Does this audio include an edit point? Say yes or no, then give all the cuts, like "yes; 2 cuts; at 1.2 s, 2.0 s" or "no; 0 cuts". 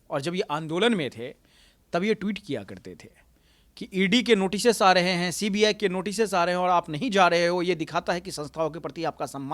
no; 0 cuts